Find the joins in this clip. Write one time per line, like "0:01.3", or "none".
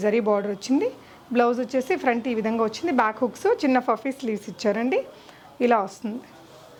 none

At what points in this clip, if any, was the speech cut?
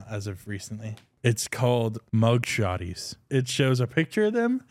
0:01.1
0:02.0
0:03.2

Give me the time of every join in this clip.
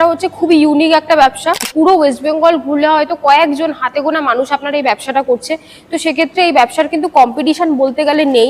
0:01.7

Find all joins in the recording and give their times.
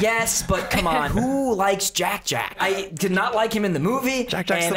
0:01.1
0:02.5

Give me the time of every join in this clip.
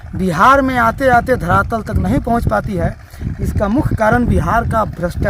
0:01.3

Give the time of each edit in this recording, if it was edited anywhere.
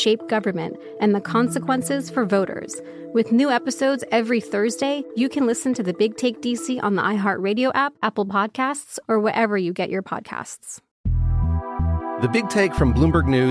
0:11.0

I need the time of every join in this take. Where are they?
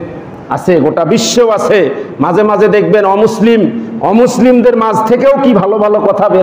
none

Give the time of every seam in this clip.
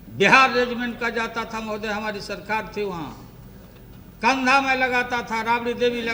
none

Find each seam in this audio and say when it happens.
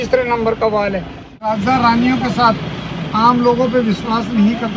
0:01.5

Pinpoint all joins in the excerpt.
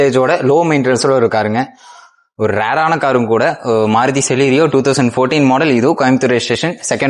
none

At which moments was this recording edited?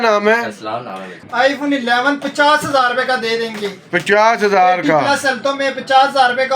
0:01.2

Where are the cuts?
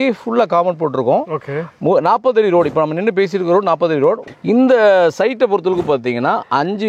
0:04.2

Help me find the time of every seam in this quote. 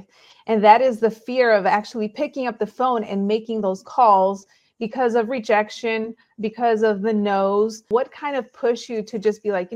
0:07.9

